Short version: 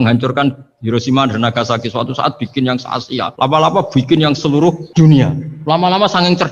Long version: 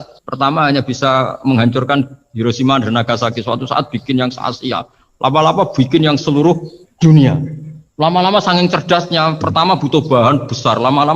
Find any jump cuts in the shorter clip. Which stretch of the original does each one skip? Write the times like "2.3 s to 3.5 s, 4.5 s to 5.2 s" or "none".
4.8 s to 5.1 s, 6.7 s to 6.9 s, 7.5 s to 7.8 s